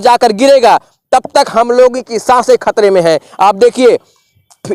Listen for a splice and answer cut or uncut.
uncut